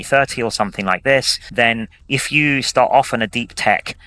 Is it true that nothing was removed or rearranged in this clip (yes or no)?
no